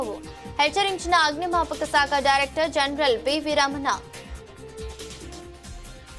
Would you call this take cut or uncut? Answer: uncut